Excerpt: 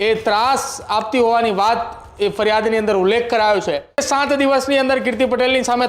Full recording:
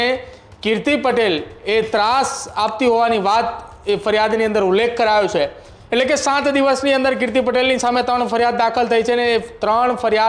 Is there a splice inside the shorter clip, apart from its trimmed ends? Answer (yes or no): yes